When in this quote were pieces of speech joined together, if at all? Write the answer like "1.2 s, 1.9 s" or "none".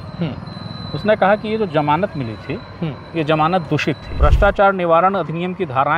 4.1 s